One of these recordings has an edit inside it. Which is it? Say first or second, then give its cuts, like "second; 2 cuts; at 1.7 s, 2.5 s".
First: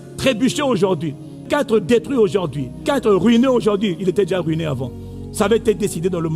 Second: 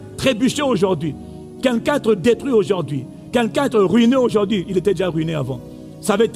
first; 2 cuts; at 1.5 s, 2.8 s